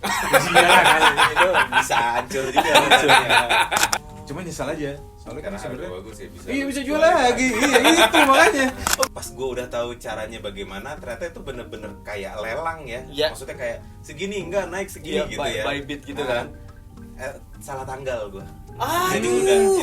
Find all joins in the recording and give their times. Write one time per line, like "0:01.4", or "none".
0:04.0
0:09.1